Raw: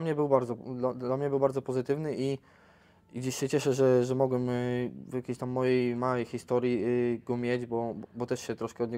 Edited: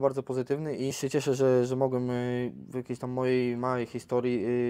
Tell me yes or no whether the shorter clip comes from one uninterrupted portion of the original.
no